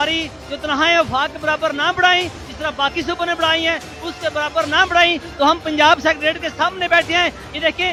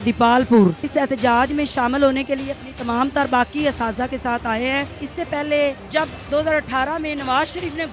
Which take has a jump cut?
second; 3 cuts; at 0.8 s, 5.0 s, 5.8 s

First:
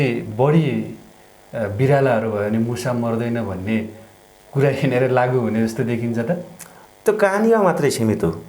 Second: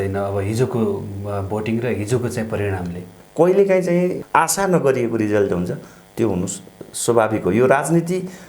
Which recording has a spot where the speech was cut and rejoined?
second; 2 cuts; at 3.2 s, 4.2 s

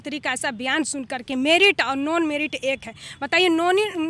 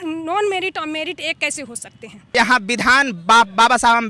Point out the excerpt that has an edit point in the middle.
second; 1 cut; at 2.4 s

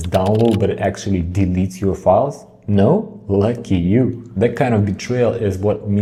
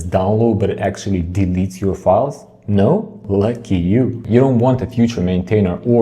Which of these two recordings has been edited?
second; 1 cut; at 4.2 s

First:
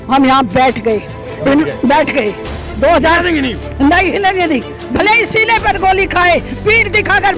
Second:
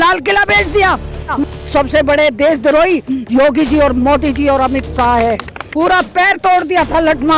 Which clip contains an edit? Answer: second; 2 cuts; at 1.4 s, 5.6 s

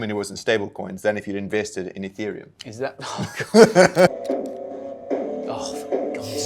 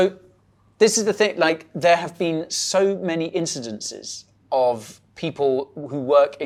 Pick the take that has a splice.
first; 1 cut; at 4.1 s

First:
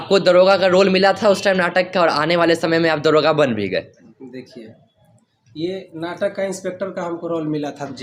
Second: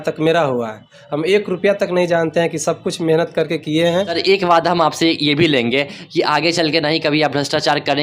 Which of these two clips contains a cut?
second; 1 cut; at 4.1 s

